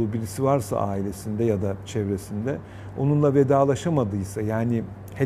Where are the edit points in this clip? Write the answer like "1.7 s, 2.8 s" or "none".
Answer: none